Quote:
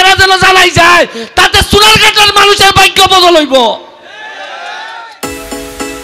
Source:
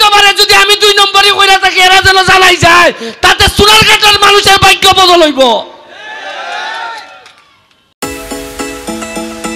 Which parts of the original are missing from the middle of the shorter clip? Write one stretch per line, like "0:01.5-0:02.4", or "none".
0:06.9-0:07.8